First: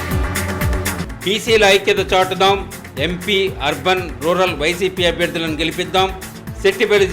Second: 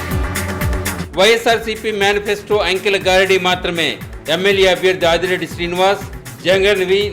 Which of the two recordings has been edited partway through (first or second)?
second